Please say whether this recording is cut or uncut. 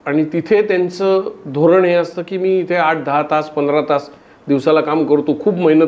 uncut